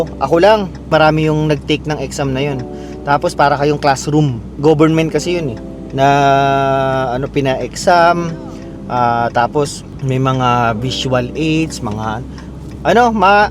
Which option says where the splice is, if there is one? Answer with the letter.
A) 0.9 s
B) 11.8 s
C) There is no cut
A